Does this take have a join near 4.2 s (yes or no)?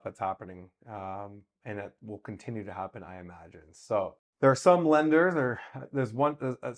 yes